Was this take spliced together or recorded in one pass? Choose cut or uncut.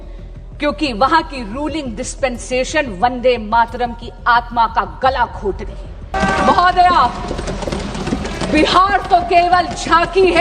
cut